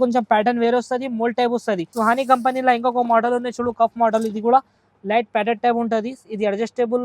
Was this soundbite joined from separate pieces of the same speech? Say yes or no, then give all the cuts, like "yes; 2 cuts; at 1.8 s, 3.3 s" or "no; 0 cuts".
yes; 1 cut; at 1.9 s